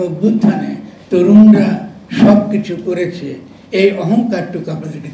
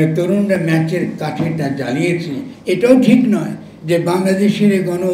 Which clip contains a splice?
second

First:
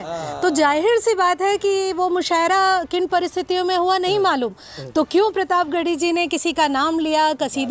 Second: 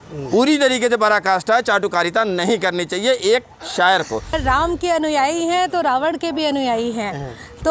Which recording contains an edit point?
second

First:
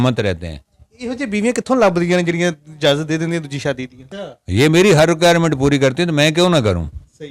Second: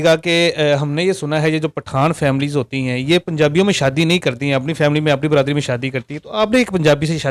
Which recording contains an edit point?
first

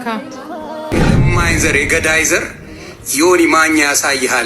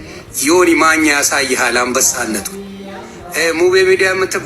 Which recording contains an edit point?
first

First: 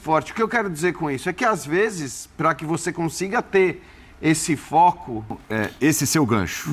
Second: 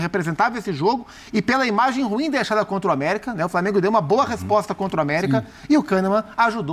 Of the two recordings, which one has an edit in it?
first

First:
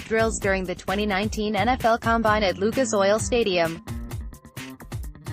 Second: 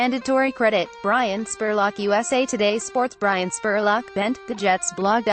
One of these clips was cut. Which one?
first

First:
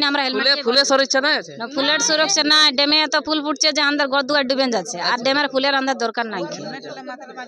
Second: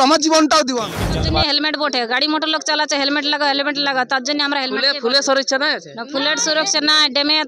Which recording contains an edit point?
second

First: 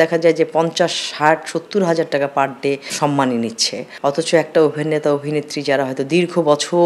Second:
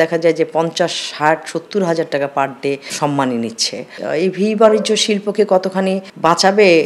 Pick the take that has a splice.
second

